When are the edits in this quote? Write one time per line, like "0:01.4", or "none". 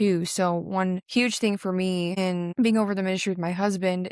0:01.0
0:02.1